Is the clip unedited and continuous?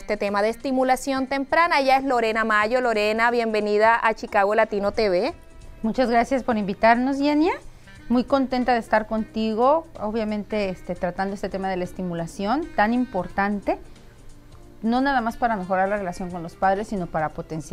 yes; 0 cuts

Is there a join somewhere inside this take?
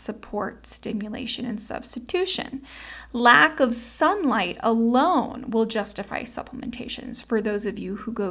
no; 0 cuts

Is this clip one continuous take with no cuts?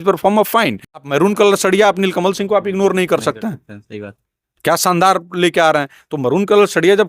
no; 1 cut; at 1.0 s

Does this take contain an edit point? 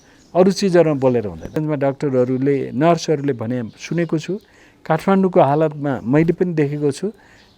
yes; 1 cut; at 1.6 s

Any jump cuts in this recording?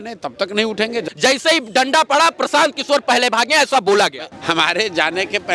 yes; 2 cuts; at 1.1 s, 4.3 s

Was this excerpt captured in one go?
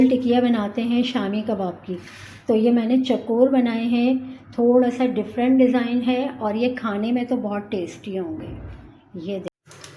yes; 0 cuts

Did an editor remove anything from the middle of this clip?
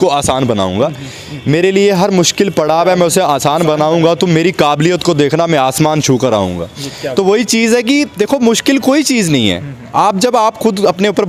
no; 0 cuts

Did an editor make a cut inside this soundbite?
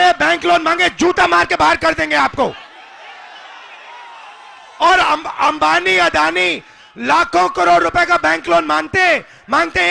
no; 0 cuts

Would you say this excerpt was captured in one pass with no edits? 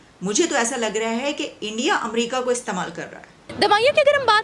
no; 1 cut; at 3.4 s

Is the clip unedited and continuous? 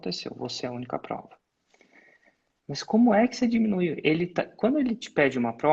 yes; 0 cuts

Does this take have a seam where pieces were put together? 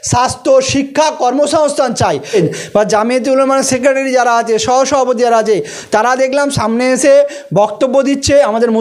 yes; 1 cut; at 2.3 s

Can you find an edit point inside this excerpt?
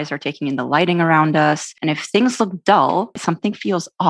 yes; 2 cuts; at 1.7 s, 3.2 s

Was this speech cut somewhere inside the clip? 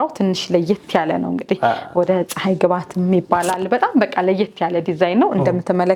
no; 0 cuts

